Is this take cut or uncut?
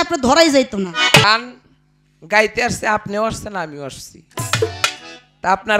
cut